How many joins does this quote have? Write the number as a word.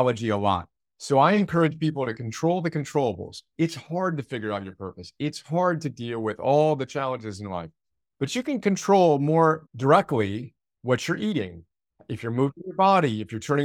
one